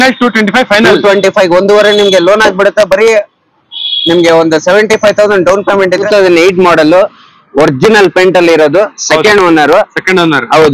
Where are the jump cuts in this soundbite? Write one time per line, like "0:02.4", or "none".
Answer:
0:06.0